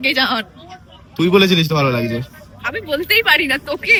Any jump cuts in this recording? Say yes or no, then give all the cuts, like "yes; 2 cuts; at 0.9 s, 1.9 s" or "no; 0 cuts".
no; 0 cuts